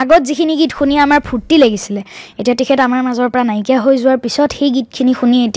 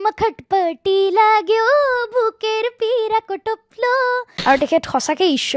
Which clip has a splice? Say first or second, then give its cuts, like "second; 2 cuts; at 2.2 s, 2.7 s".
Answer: second; 1 cut; at 4.3 s